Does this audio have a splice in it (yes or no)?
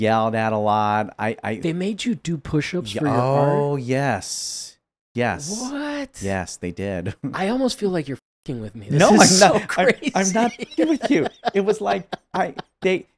no